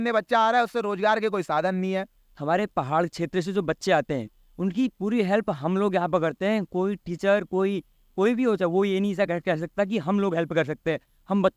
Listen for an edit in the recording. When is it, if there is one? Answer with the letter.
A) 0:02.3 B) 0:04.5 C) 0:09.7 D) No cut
A